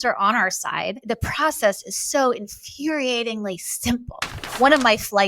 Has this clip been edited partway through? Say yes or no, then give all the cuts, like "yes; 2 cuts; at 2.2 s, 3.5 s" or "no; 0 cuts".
yes; 2 cuts; at 1.0 s, 4.4 s